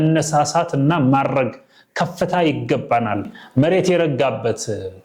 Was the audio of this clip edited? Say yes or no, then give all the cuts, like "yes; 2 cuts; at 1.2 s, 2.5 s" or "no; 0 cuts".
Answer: yes; 1 cut; at 3.4 s